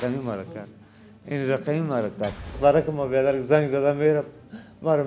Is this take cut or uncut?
cut